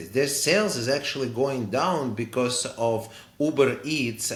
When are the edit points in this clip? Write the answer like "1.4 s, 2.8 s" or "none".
none